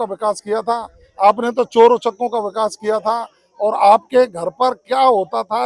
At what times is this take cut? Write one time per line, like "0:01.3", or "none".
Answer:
none